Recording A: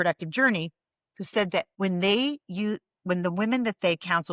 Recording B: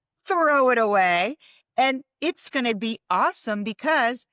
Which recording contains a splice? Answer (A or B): A